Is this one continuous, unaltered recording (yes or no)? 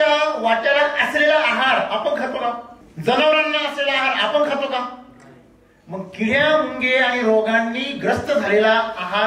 yes